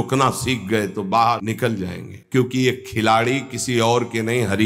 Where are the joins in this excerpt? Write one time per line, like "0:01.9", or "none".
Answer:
0:02.0